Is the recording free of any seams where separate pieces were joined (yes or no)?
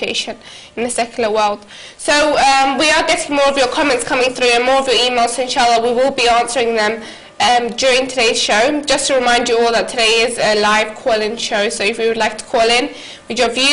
no